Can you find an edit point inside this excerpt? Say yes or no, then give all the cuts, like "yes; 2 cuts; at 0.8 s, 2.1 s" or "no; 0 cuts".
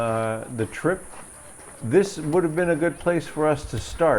no; 0 cuts